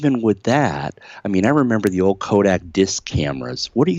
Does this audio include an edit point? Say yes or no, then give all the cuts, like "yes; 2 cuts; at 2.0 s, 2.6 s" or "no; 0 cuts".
no; 0 cuts